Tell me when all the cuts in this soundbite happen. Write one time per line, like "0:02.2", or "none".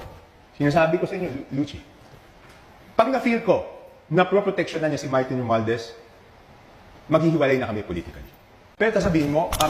0:08.6